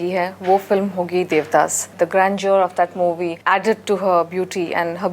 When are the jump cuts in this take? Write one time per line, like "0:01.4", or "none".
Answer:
0:01.8
0:03.4